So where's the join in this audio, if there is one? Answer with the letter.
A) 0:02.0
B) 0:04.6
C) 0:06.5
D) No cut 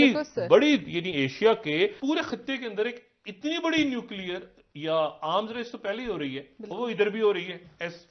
A